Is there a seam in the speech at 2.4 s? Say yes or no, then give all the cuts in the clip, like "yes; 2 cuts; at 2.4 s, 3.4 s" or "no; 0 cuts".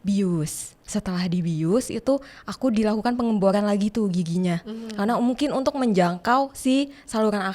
no; 0 cuts